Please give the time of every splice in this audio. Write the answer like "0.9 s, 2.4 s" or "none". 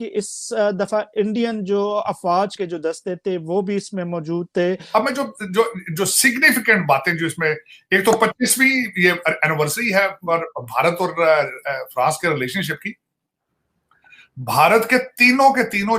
2.5 s, 4.8 s